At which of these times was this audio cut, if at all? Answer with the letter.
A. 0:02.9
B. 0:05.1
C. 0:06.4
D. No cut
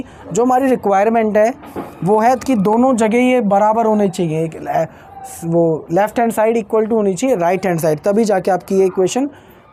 D